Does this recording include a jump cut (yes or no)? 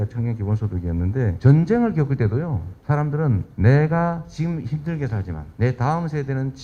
yes